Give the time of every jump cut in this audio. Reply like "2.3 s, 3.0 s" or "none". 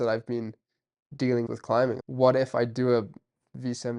1.7 s